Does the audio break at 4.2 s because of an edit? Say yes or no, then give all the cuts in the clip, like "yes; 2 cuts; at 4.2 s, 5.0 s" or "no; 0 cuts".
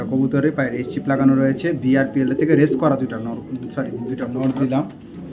yes; 1 cut; at 4.2 s